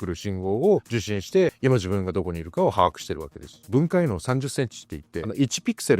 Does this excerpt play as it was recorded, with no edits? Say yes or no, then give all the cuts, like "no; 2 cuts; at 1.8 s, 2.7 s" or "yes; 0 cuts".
no; 2 cuts; at 1.6 s, 3.6 s